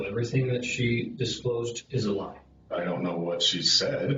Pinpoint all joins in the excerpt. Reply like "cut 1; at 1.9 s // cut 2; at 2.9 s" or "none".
cut 1; at 1.8 s // cut 2; at 2.7 s